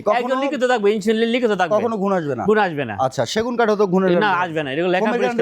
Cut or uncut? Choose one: uncut